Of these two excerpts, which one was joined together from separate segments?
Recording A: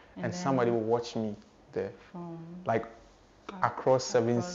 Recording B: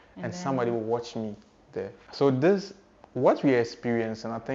B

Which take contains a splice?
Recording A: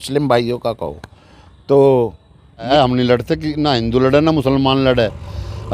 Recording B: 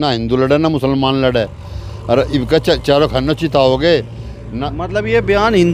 A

